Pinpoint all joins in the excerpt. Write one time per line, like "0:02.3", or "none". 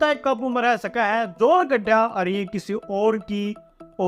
none